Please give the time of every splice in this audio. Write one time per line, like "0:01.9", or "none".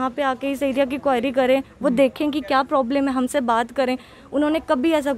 none